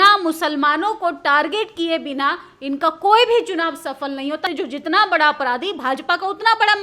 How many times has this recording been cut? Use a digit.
1